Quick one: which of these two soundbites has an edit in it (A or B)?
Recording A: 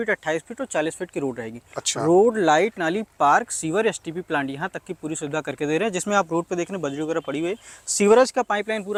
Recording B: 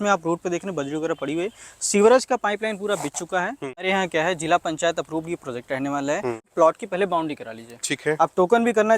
B